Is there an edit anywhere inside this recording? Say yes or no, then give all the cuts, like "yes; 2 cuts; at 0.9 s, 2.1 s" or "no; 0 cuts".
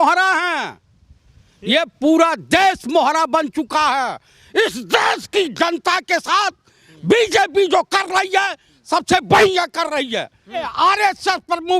yes; 1 cut; at 10.7 s